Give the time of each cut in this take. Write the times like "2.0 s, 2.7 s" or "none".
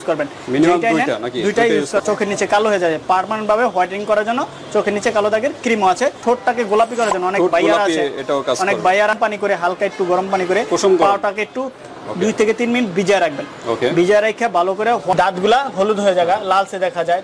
2.0 s, 6.2 s, 9.1 s, 15.1 s

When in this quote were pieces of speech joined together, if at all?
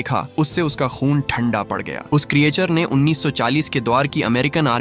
none

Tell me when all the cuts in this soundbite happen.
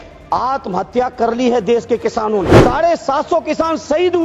2.5 s

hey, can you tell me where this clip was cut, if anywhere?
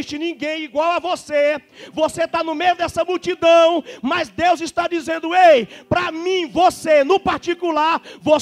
none

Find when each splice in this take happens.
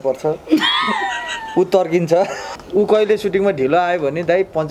2.4 s

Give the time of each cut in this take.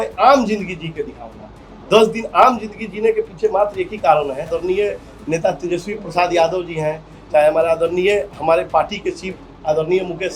4.5 s

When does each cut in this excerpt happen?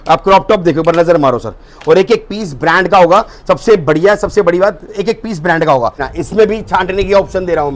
6.0 s

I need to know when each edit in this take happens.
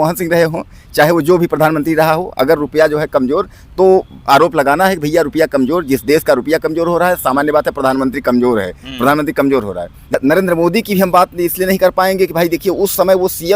10.1 s

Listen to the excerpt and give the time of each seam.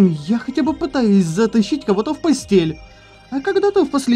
none

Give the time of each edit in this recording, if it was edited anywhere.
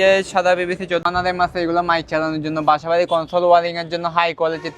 1.1 s

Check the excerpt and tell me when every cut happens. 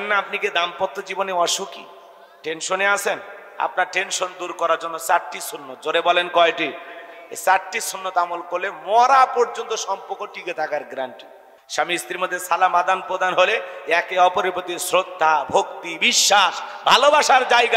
11.5 s

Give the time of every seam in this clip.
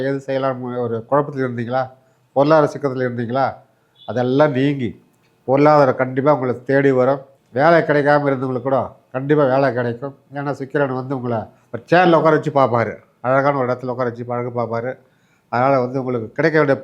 7.4 s

